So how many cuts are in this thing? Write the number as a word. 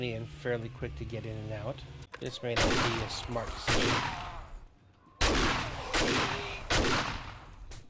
one